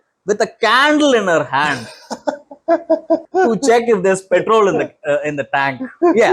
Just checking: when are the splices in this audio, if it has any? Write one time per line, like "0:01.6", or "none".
0:03.2